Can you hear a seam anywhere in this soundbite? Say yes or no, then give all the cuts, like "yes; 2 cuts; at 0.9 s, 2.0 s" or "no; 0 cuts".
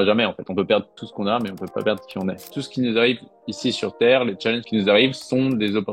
yes; 2 cuts; at 1.0 s, 2.4 s